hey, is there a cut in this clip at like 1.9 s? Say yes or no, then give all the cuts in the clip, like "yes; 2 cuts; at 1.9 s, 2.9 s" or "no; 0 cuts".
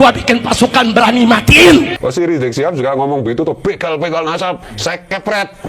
yes; 1 cut; at 1.9 s